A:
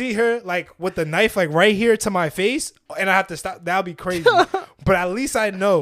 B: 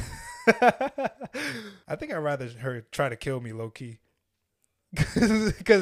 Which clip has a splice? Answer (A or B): B